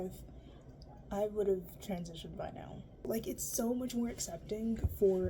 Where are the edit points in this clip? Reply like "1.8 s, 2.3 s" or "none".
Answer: 3.1 s